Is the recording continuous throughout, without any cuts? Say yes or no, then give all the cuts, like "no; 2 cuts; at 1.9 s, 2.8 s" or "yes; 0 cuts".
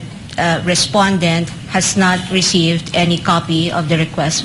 yes; 0 cuts